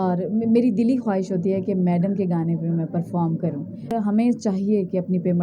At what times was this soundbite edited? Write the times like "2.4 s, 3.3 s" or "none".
4.0 s